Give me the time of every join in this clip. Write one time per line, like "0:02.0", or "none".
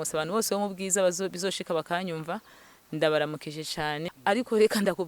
0:04.1